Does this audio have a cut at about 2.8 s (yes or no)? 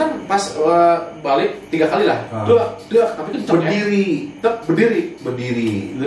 no